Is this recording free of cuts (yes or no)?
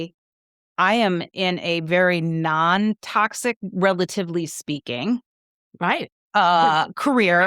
yes